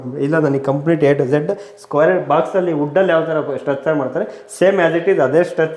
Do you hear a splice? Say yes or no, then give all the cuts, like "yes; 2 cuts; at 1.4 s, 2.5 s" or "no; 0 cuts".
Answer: no; 0 cuts